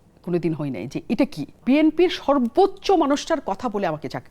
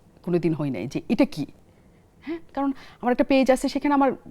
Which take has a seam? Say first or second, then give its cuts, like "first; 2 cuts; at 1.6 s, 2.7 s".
first; 1 cut; at 1.6 s